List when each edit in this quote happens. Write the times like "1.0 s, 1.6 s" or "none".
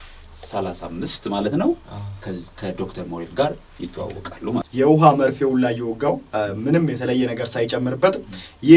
4.7 s